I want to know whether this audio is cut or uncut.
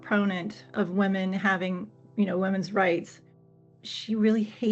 cut